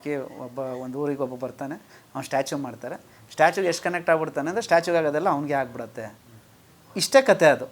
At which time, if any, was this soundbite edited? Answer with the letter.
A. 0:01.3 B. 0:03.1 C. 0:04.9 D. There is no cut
D